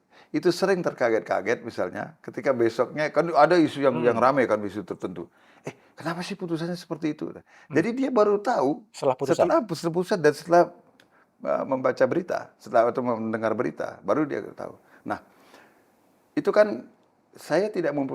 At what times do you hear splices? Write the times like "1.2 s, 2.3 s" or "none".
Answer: none